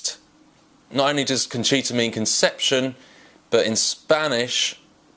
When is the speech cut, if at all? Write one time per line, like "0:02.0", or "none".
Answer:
0:02.4